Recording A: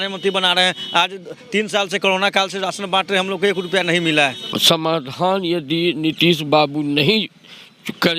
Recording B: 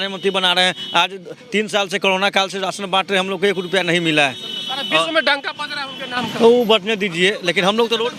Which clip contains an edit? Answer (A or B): A